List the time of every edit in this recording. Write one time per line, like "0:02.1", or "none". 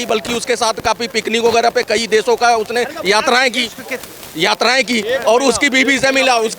none